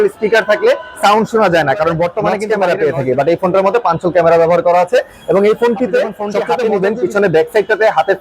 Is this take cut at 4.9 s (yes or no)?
no